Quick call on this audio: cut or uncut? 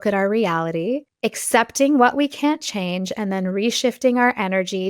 cut